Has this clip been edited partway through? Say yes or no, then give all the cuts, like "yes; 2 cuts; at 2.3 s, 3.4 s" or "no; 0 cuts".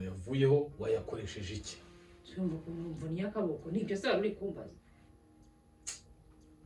no; 0 cuts